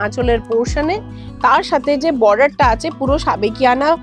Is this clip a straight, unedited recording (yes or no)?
yes